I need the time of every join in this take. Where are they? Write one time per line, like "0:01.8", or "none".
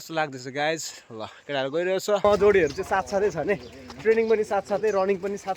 0:02.2